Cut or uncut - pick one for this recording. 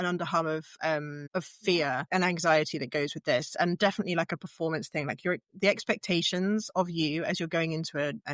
cut